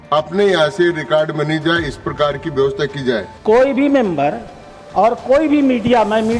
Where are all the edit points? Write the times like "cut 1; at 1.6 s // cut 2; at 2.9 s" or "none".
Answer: cut 1; at 3.3 s